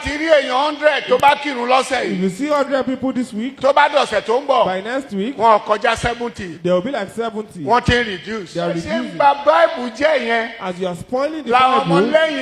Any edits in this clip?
yes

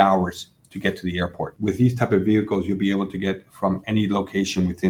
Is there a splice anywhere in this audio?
yes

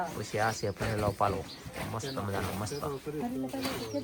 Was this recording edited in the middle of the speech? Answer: no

